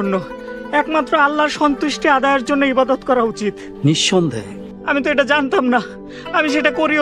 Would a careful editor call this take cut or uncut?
uncut